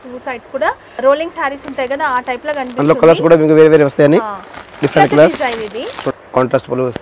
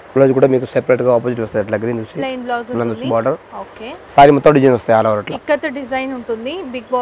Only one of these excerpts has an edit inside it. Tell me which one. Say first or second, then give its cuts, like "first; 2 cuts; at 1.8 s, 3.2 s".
first; 2 cuts; at 0.9 s, 6.1 s